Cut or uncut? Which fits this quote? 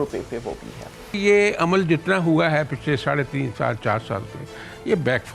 cut